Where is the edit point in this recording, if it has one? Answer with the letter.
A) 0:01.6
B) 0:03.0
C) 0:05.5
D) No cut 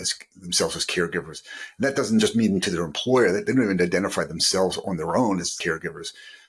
C